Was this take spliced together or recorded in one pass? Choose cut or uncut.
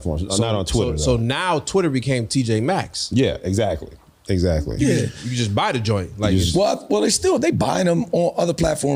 uncut